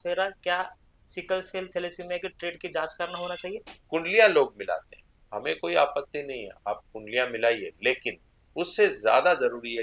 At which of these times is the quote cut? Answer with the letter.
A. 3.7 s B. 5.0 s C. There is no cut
A